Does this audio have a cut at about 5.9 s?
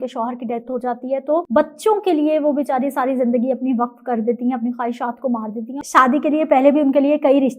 yes; 2 cuts; at 1.5 s, 5.9 s

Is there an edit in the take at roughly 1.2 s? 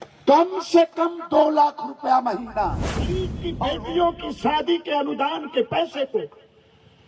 no; 1 cut; at 3.4 s

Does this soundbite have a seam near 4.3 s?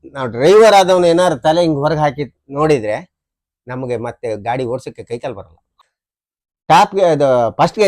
no; 1 cut; at 5.7 s

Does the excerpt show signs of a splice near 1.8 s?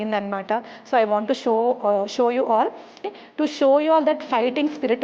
no; 1 cut; at 3.1 s

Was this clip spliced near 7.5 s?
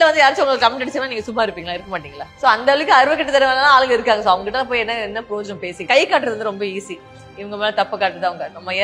no; 2 cuts; at 2.2 s, 5.8 s

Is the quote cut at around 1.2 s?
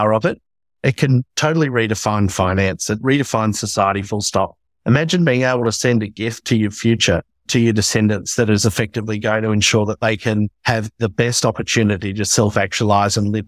no; 3 cuts; at 3.0 s, 7.5 s, 10.6 s

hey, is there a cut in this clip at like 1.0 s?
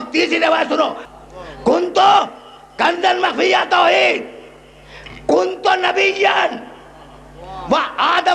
yes; 1 cut; at 1.0 s

